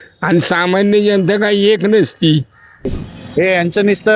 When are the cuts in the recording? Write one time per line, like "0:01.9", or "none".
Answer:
0:03.1